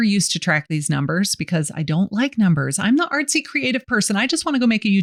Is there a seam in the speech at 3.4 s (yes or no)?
no